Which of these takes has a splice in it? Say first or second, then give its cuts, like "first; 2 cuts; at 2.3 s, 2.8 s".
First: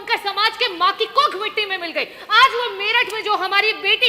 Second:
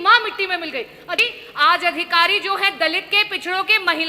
second; 1 cut; at 1.2 s